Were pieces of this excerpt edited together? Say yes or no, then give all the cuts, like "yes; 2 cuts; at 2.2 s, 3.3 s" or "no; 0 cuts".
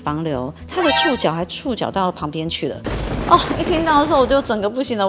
no; 0 cuts